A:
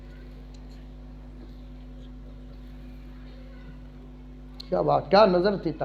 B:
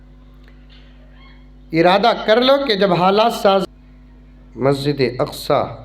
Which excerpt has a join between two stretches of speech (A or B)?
B